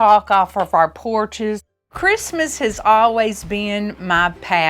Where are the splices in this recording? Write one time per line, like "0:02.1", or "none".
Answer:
0:01.7